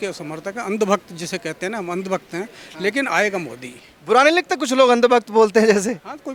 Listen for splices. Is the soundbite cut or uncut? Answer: uncut